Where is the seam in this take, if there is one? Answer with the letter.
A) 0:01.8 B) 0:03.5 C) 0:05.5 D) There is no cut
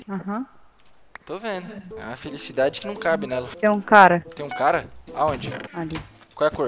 D